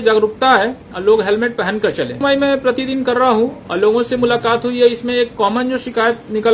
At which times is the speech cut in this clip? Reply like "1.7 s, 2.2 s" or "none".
2.2 s